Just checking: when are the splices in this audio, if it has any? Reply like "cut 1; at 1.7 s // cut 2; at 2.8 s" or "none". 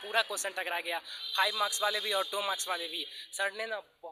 none